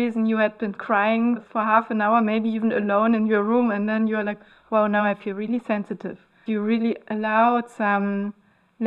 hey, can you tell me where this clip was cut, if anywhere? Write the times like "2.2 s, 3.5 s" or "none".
1.5 s, 6.4 s